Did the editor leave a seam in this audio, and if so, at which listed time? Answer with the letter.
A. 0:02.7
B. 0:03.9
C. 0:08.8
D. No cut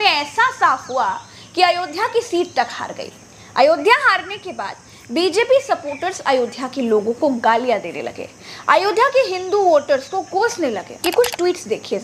D